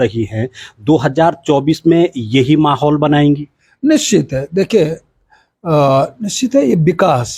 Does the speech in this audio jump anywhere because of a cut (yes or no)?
no